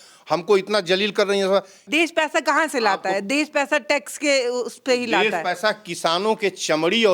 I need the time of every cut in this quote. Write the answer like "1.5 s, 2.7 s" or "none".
1.8 s